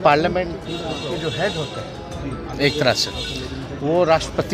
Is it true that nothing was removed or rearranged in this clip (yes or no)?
yes